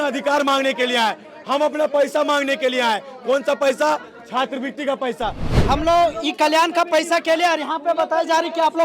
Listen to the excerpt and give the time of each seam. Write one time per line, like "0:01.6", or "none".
0:05.4